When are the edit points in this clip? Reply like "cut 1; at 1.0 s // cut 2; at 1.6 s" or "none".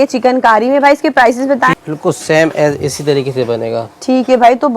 cut 1; at 1.7 s